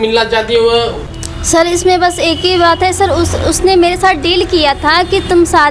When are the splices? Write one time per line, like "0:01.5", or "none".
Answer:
0:01.1